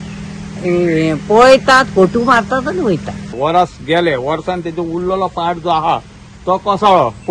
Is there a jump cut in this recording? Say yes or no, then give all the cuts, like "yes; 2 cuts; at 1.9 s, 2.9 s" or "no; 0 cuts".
yes; 1 cut; at 3.3 s